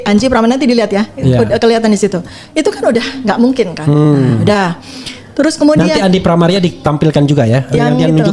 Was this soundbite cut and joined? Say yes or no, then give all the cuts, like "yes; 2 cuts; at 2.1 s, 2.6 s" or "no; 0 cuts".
no; 0 cuts